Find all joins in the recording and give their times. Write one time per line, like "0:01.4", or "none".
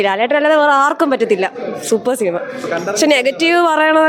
none